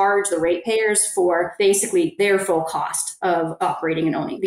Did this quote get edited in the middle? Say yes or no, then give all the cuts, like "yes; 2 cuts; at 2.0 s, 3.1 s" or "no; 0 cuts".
yes; 2 cuts; at 1.9 s, 3.3 s